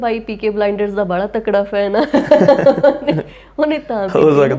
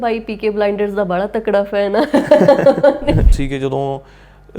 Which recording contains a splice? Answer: second; 1 cut; at 3.4 s

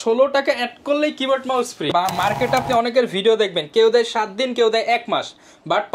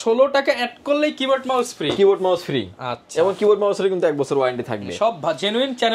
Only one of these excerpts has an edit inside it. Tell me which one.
first; 1 cut; at 1.9 s

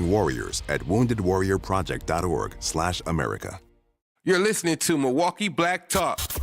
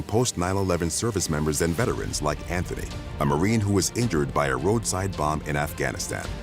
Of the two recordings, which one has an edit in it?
first; 1 cut; at 4.0 s

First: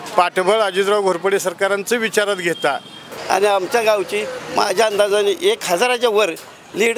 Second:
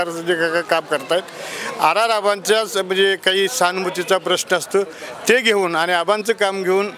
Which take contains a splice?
first; 1 cut; at 3.1 s

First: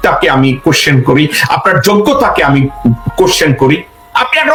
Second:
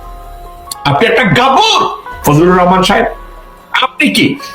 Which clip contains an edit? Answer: second; 1 cut; at 2.1 s

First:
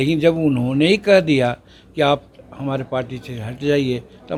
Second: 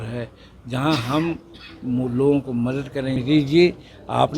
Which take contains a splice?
second; 1 cut; at 3.2 s

